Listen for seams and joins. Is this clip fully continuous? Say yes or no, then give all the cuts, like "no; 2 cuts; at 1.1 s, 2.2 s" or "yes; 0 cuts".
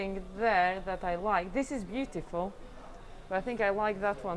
yes; 0 cuts